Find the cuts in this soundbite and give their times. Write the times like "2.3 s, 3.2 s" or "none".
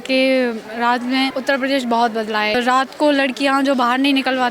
1.4 s, 2.6 s

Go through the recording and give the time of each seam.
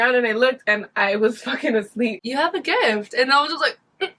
2.2 s

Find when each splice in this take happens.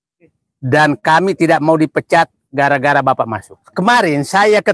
3.7 s

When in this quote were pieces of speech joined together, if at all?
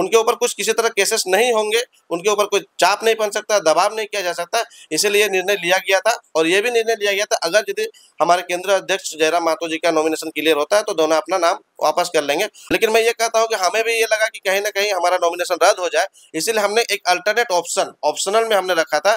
12.6 s

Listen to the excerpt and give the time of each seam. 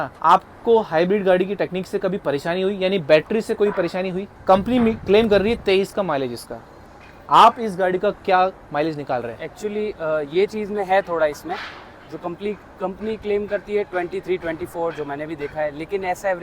4.3 s

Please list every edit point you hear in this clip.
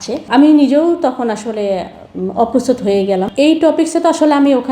3.3 s

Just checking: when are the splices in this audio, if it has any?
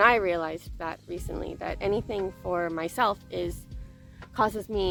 none

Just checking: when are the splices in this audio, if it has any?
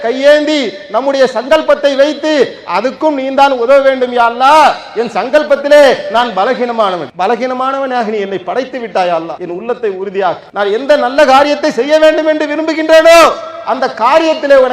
7.1 s, 9.4 s, 10.4 s

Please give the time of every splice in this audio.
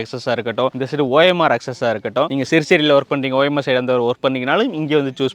2.3 s

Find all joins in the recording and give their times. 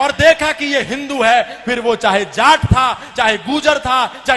none

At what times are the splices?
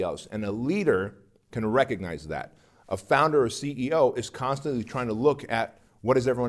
none

